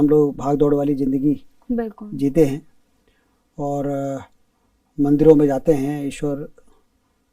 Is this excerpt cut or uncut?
uncut